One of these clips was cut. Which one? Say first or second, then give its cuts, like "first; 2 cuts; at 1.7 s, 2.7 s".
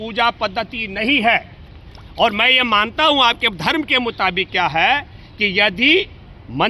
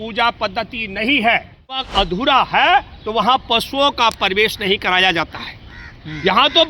second; 1 cut; at 1.9 s